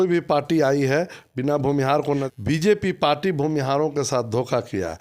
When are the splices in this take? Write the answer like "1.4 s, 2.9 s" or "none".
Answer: 2.2 s